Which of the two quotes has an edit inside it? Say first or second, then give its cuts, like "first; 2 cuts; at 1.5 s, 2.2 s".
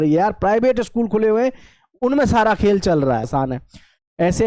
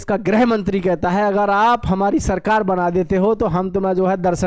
first; 1 cut; at 3.3 s